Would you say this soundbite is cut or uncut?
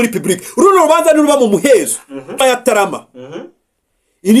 cut